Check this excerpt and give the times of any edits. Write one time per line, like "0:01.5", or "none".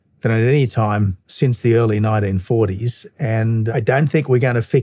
0:03.7